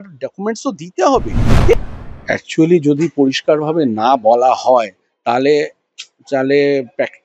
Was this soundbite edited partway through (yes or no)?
yes